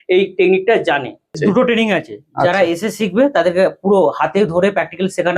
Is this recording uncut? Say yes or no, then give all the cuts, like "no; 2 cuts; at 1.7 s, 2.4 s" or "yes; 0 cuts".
no; 1 cut; at 1.4 s